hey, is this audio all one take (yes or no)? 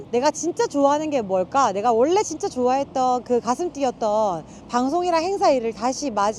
yes